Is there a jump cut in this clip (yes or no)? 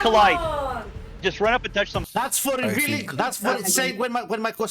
yes